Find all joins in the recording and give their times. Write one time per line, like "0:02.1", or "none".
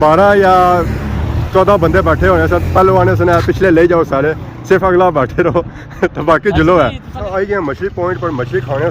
0:07.1